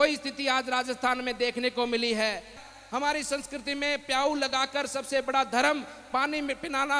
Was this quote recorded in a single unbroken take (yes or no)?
no